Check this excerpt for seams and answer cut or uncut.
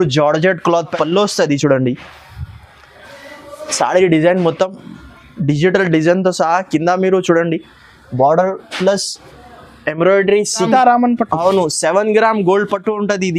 cut